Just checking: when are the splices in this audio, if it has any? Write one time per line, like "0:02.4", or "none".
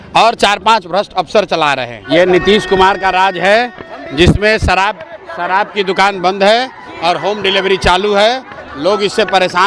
0:01.9